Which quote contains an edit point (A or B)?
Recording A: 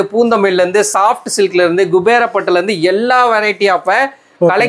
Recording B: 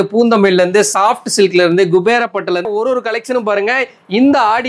B